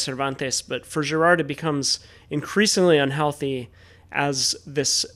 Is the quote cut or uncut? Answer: uncut